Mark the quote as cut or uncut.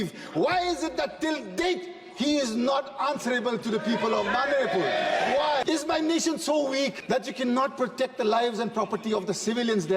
cut